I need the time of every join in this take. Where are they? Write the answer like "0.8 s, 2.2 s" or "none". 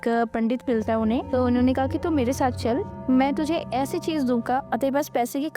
1.3 s, 2.9 s, 4.6 s